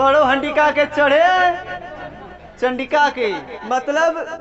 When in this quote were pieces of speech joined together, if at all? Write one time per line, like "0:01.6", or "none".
0:03.5